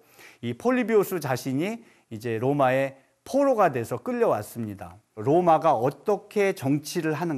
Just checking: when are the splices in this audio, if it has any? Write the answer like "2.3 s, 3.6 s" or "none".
5.1 s